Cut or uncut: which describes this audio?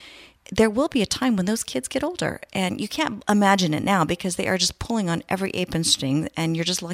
uncut